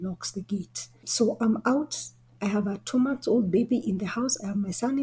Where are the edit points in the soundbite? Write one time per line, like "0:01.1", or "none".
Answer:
none